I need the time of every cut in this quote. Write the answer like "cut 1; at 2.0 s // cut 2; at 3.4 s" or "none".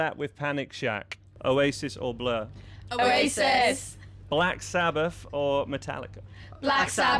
cut 1; at 1.3 s